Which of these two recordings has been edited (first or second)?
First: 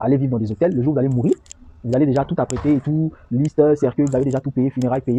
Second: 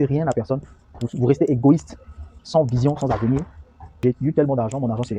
second